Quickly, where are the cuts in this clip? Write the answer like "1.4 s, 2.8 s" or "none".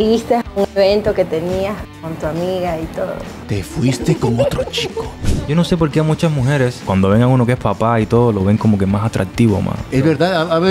3.3 s, 5.3 s, 6.8 s, 9.8 s